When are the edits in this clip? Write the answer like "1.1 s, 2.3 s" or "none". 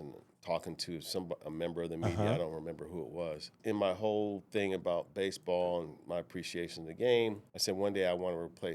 3.5 s, 7.5 s